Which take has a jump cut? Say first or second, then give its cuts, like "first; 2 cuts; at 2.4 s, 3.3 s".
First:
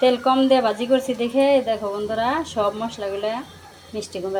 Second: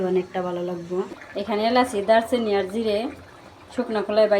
second; 1 cut; at 1.1 s